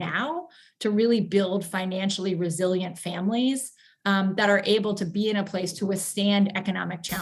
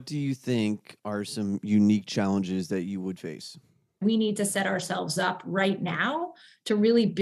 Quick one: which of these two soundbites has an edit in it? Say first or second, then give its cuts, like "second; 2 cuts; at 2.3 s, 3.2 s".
second; 1 cut; at 4.0 s